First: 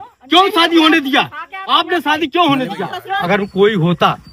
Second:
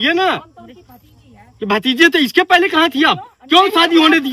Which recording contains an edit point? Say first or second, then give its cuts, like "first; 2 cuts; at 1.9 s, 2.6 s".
first; 1 cut; at 3.2 s